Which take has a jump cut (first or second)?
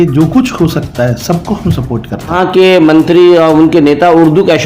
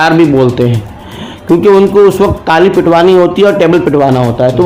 first